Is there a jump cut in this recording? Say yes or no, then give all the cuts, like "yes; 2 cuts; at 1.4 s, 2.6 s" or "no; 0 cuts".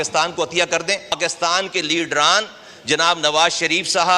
yes; 1 cut; at 1.2 s